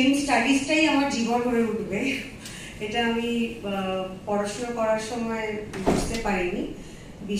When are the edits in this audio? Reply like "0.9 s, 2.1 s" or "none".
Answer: none